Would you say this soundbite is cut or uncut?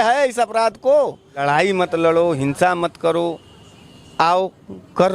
cut